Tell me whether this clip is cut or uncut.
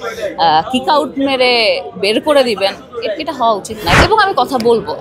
cut